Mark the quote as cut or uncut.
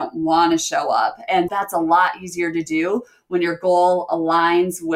cut